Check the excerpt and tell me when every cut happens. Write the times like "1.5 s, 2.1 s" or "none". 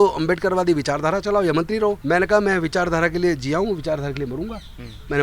2.0 s